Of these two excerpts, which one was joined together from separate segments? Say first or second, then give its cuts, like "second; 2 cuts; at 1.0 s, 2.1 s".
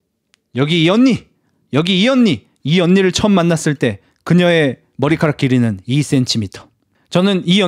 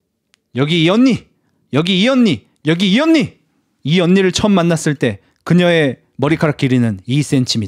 first; 1 cut; at 2.5 s